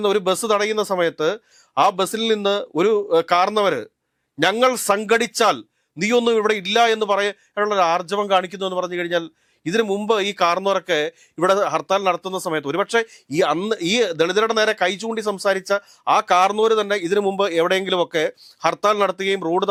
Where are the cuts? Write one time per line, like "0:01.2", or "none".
none